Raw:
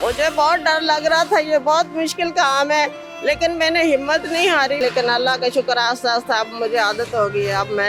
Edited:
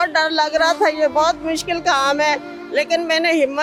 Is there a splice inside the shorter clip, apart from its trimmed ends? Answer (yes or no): no